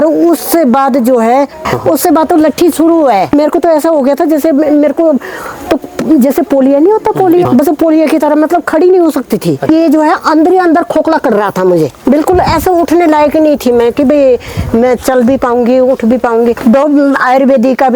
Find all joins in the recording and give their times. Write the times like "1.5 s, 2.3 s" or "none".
1.7 s, 3.3 s, 7.4 s, 12.0 s, 16.6 s